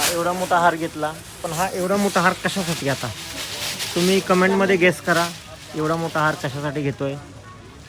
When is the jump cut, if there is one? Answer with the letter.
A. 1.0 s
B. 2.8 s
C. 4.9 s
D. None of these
D